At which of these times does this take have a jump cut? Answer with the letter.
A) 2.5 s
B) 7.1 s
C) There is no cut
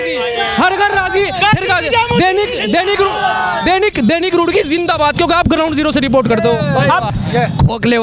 B